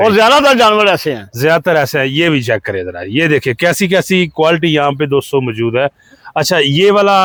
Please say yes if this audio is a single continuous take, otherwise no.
yes